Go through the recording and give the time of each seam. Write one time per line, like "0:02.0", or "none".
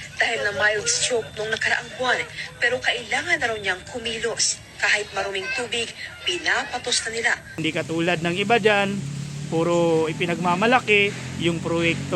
0:07.6

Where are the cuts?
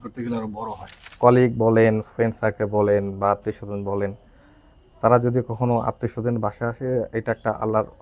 0:00.9

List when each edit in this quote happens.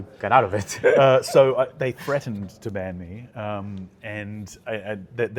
none

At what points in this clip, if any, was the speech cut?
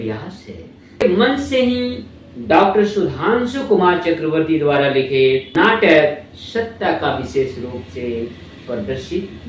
0:01.0
0:05.5

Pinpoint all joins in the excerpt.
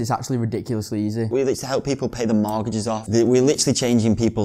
0:01.3
0:03.0

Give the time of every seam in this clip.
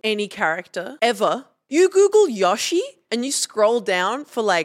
0:00.9
0:01.6
0:03.0

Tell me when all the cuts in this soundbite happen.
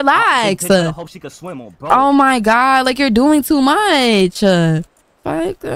none

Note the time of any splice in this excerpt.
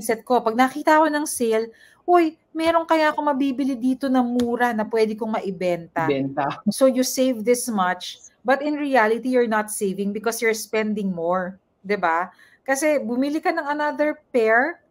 0:06.8

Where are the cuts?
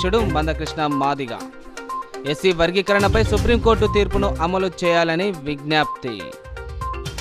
none

